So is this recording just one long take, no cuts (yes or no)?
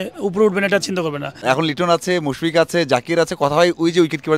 no